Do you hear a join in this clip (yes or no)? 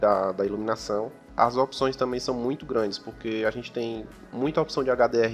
no